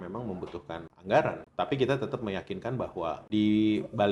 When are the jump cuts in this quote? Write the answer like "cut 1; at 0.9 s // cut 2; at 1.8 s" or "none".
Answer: cut 1; at 0.9 s // cut 2; at 1.4 s // cut 3; at 3.2 s